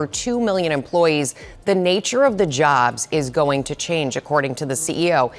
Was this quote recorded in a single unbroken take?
yes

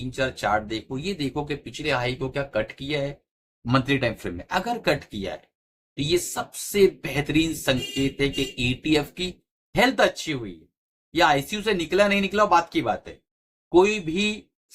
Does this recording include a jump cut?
no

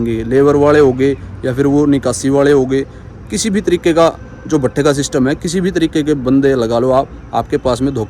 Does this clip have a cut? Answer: no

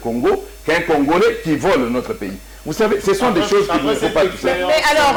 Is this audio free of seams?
yes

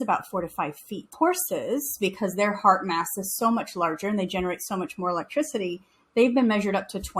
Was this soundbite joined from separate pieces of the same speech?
yes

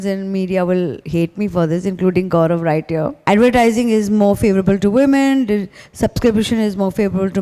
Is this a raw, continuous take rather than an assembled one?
no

